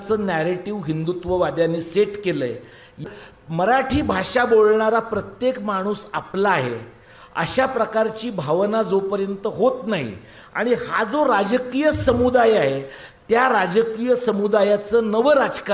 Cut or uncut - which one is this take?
cut